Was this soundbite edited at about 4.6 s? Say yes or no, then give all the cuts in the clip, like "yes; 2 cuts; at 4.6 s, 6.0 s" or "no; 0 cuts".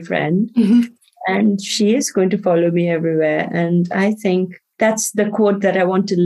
yes; 1 cut; at 4.6 s